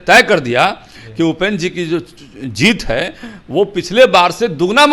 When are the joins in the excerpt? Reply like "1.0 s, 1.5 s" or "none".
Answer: none